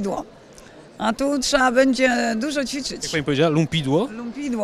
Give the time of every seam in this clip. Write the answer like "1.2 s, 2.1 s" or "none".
none

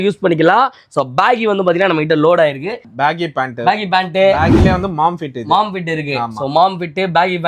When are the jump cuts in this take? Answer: 2.9 s

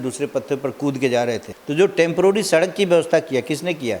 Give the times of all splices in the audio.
1.5 s

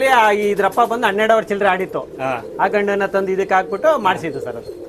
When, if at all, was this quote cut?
none

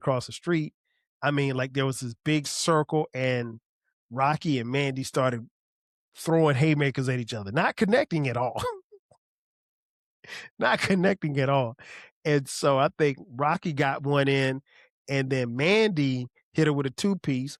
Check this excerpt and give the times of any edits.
none

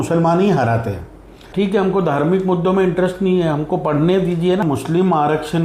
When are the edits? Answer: 1.5 s, 4.6 s

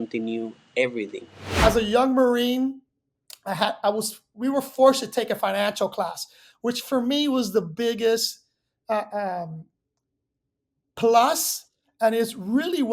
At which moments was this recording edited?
1.4 s

